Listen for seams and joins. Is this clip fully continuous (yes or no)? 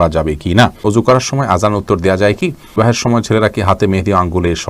no